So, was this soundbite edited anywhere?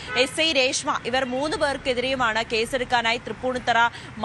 no; 0 cuts

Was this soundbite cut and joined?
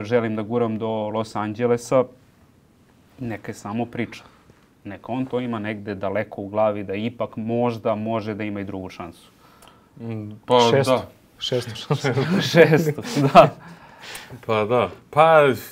no; 0 cuts

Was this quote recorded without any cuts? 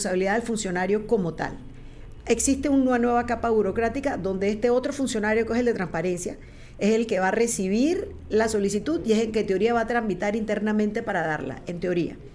yes; 0 cuts

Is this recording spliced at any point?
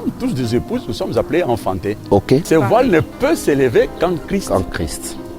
yes; 1 cut; at 2.4 s

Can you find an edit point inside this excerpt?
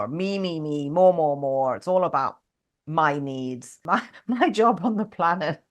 yes; 1 cut; at 3.8 s

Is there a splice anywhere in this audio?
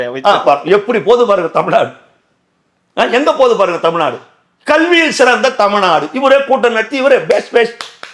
no; 0 cuts

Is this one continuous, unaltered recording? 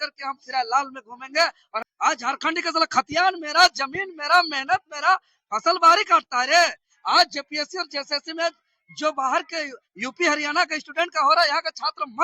no; 1 cut; at 1.8 s

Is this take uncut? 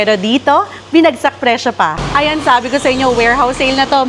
no; 1 cut; at 2.0 s

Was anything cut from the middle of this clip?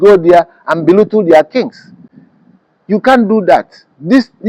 no; 0 cuts

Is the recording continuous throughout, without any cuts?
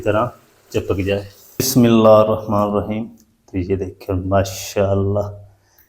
no; 1 cut; at 1.7 s

